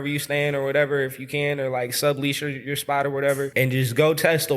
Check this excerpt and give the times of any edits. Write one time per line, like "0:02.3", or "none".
0:03.5